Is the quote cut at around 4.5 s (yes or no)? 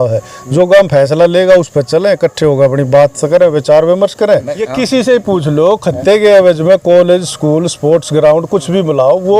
yes